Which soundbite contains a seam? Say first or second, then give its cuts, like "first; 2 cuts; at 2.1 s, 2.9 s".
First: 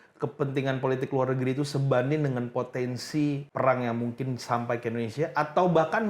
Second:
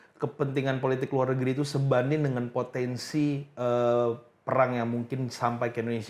first; 1 cut; at 3.5 s